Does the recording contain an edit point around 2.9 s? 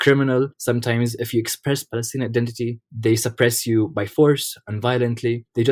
no; 0 cuts

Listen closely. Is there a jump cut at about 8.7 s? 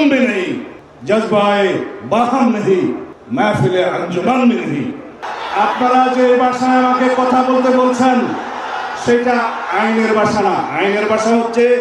no; 2 cuts; at 3.1 s, 5.1 s

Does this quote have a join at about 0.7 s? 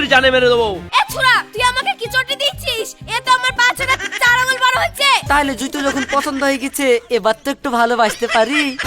yes; 3 cuts; at 0.7 s, 3.5 s, 5.2 s

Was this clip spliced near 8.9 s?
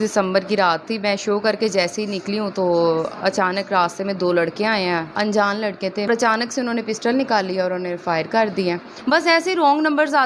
yes; 3 cuts; at 5.1 s, 6.1 s, 8.9 s

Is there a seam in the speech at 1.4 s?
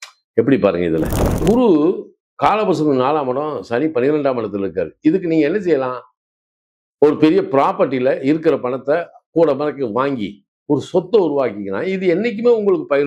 yes; 1 cut; at 1.4 s

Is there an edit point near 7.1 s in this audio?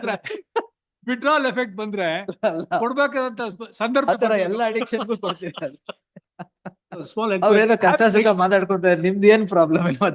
yes; 1 cut; at 7.1 s

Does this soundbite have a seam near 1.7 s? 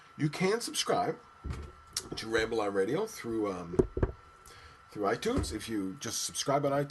no; 0 cuts

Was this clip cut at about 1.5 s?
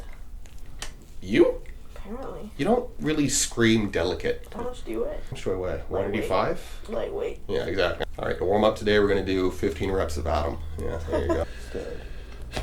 no; 3 cuts; at 5.1 s, 8.0 s, 11.4 s

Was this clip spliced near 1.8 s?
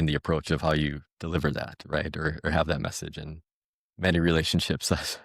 no; 0 cuts

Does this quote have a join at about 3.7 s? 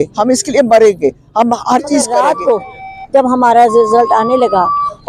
no; 1 cut; at 2.1 s

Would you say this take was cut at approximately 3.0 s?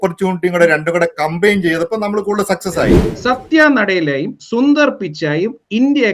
yes; 1 cut; at 3.0 s

